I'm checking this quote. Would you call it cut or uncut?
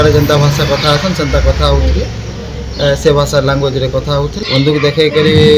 cut